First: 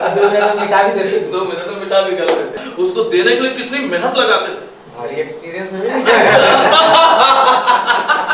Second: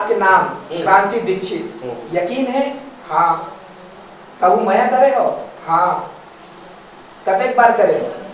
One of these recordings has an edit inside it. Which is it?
first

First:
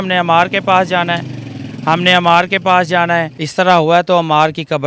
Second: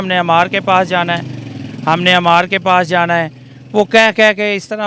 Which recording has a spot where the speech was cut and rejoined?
first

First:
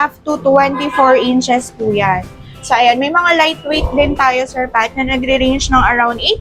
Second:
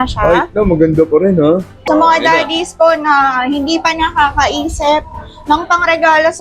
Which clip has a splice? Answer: second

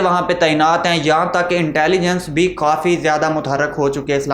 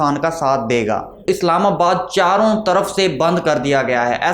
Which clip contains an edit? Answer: second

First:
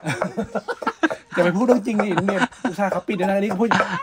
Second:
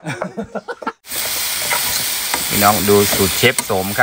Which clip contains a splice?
second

